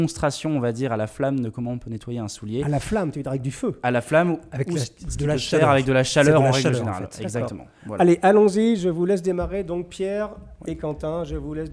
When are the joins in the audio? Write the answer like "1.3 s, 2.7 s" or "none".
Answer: none